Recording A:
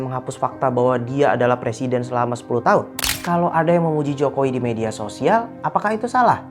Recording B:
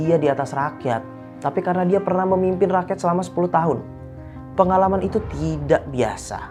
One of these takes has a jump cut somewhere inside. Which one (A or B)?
A